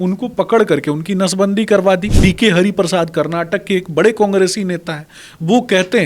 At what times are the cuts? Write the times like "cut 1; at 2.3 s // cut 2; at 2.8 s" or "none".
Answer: cut 1; at 2.1 s